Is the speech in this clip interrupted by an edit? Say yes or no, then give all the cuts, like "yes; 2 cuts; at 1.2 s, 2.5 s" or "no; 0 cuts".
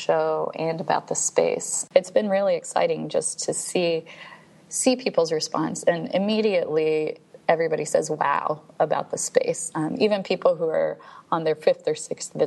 yes; 1 cut; at 1.7 s